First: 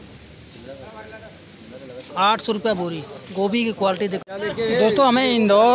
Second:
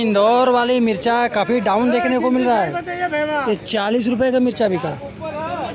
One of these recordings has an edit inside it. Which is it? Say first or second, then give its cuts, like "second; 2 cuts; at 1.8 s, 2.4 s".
first; 1 cut; at 4.2 s